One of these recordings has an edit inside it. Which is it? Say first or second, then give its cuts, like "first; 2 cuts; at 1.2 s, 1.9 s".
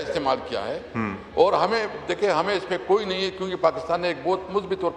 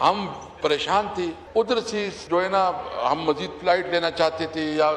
second; 2 cuts; at 1.4 s, 2.2 s